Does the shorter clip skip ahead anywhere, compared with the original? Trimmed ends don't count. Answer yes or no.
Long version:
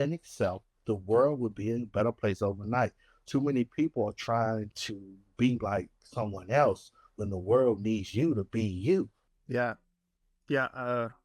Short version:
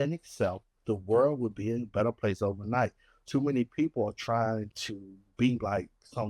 no